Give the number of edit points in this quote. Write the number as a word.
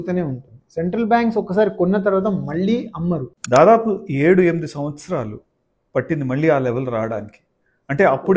one